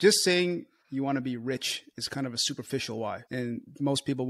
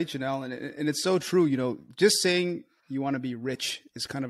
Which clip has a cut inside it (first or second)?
first